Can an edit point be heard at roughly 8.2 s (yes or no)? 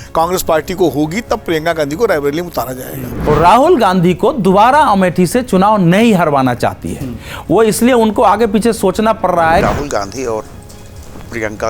no